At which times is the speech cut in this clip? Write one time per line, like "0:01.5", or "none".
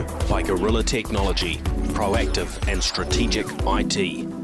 none